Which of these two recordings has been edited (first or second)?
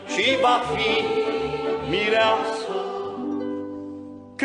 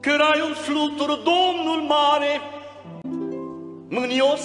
first